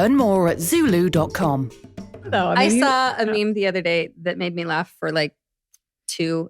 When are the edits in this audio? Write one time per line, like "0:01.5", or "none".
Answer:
0:02.3